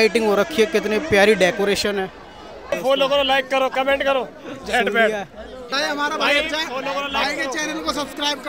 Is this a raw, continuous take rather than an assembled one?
no; 2 cuts; at 2.7 s, 5.7 s

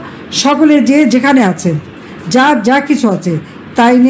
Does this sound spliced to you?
no; 0 cuts

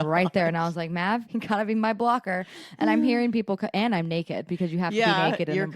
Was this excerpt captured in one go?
no; 1 cut; at 1.3 s

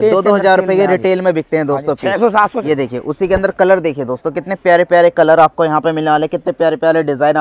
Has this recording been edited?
yes; 1 cut; at 2.6 s

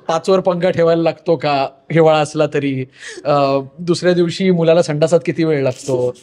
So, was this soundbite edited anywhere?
no; 0 cuts

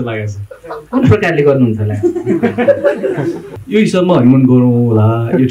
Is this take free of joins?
no; 1 cut; at 3.5 s

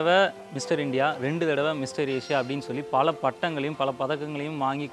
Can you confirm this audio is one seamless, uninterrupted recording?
yes; 0 cuts

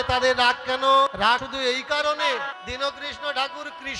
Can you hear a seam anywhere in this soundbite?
yes; 2 cuts; at 1.3 s, 2.5 s

